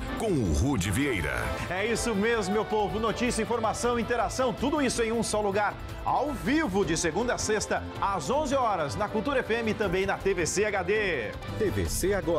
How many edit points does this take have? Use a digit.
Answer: 1